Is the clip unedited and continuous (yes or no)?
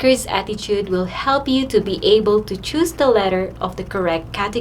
yes